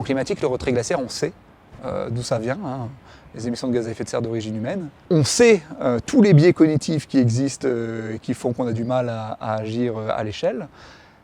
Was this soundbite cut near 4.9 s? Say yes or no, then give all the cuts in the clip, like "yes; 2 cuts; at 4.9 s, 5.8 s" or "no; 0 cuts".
yes; 1 cut; at 4.9 s